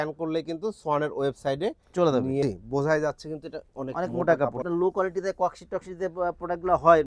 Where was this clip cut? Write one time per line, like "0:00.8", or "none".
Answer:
0:02.4
0:04.6

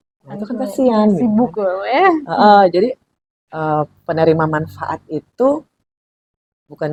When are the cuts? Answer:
none

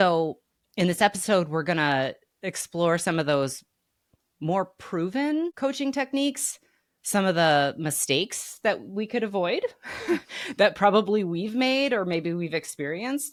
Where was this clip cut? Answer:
none

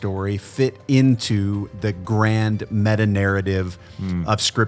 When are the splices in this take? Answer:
none

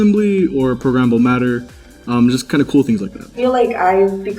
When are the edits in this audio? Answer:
0:03.3

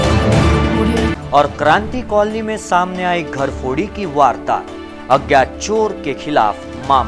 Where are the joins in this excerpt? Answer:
0:01.0

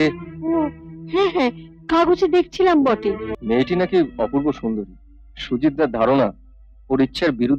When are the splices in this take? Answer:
0:03.3

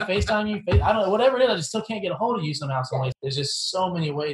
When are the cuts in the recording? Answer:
0:03.1

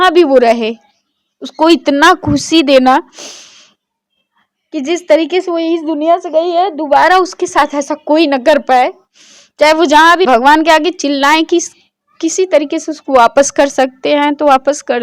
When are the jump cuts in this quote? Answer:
0:10.3

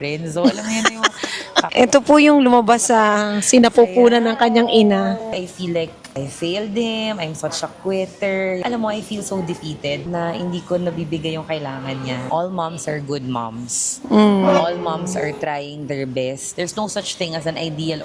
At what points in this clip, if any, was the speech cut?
0:01.7
0:05.4
0:08.6
0:12.2
0:16.5

